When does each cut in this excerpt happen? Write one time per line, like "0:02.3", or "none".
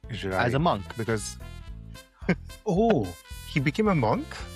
none